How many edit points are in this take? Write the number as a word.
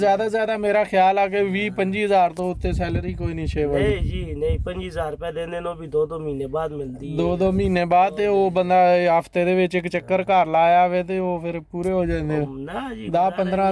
zero